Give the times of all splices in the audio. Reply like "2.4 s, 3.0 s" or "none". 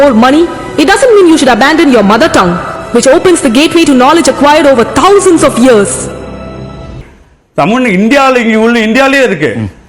6.9 s